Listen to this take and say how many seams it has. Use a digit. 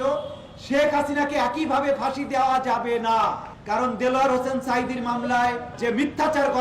2